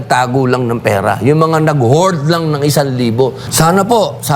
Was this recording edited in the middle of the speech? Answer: yes; 1 cut; at 3.4 s

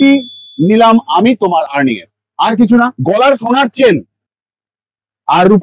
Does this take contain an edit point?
yes; 1 cut; at 3.0 s

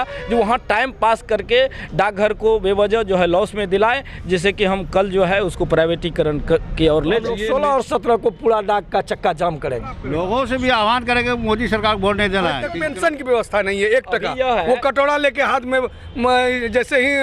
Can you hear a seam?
yes; 3 cuts; at 7.3 s, 10.0 s, 12.7 s

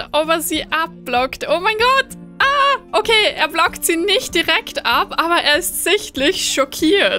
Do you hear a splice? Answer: no; 0 cuts

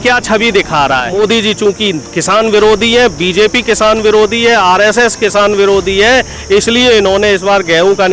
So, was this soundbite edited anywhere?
yes; 1 cut; at 1.1 s

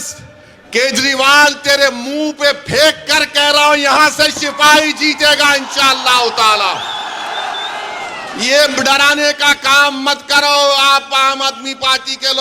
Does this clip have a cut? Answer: no; 0 cuts

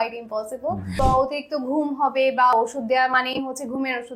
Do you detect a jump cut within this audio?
yes; 2 cuts; at 0.9 s, 2.5 s

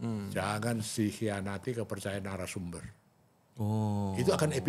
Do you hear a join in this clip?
no; 0 cuts

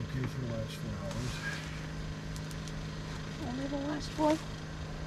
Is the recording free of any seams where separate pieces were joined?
yes; 0 cuts

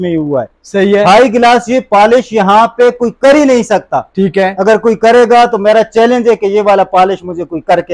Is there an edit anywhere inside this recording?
no; 0 cuts

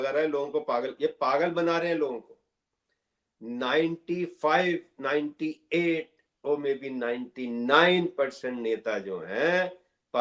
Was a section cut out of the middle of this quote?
no; 0 cuts

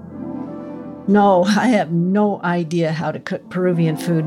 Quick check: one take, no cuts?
no; 1 cut; at 1.0 s

